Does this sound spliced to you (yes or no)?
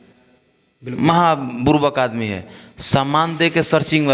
no